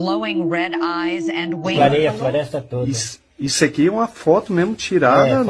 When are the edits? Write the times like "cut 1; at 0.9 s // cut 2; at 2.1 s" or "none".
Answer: cut 1; at 1.7 s